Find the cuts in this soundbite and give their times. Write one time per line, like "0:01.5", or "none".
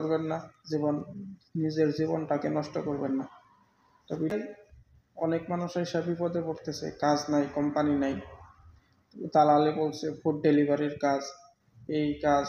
0:04.3